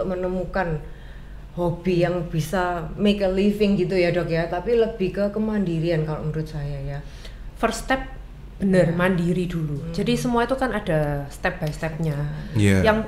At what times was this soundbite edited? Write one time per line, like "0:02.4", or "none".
none